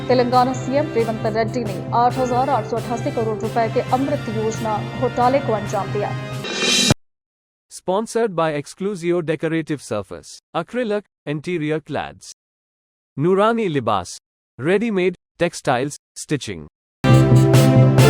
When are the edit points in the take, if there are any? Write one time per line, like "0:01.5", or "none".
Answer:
0:16.9